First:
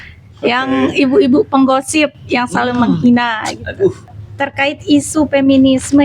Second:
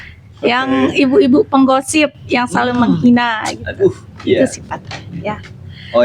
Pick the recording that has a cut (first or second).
first